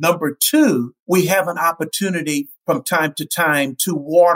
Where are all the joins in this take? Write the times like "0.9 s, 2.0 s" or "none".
0.9 s, 2.5 s